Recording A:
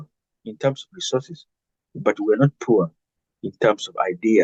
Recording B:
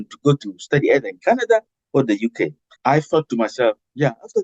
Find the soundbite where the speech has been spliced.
B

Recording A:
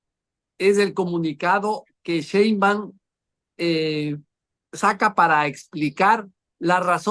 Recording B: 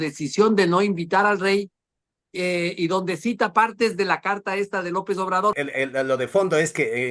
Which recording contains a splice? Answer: B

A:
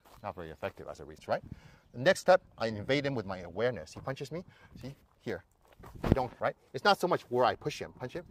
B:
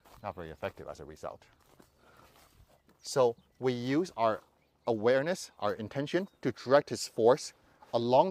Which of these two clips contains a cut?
A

